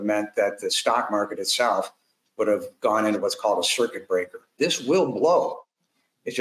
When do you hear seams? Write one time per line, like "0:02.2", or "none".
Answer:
0:04.5